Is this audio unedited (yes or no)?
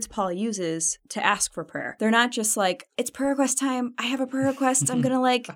no